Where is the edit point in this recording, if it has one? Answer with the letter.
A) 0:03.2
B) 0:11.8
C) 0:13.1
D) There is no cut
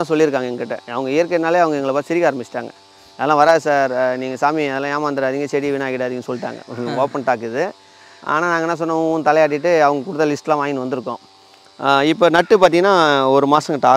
D